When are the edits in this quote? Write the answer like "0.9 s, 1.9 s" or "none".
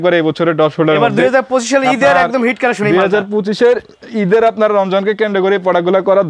none